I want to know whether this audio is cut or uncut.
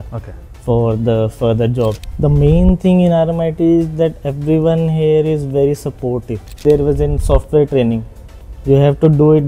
cut